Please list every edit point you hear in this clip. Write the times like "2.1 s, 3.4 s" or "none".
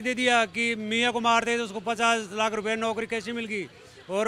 none